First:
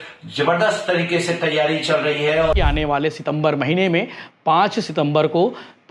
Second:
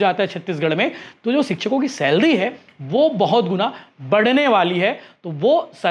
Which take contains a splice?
first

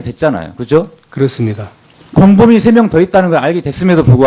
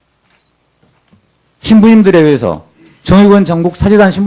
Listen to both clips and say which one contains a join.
first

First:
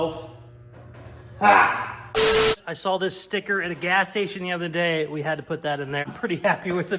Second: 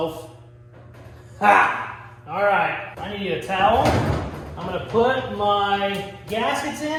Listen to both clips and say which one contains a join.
first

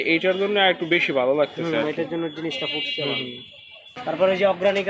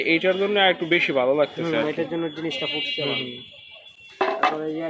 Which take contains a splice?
first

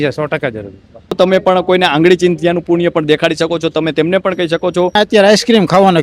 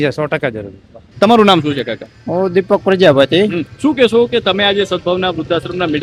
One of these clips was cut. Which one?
first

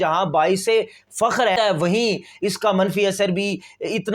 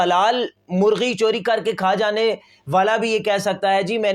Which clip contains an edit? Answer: first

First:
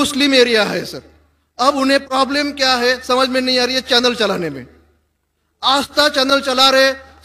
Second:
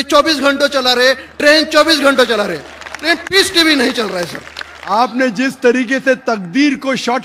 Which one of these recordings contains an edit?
second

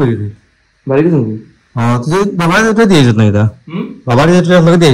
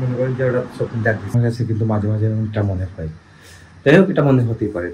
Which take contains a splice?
second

